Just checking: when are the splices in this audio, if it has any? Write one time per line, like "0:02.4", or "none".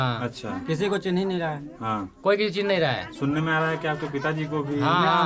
none